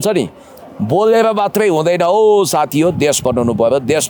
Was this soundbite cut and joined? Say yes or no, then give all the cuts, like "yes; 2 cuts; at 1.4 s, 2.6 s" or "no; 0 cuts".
no; 0 cuts